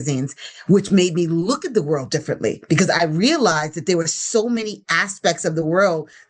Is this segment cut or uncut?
uncut